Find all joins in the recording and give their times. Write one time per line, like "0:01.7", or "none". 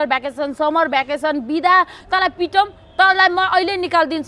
0:02.0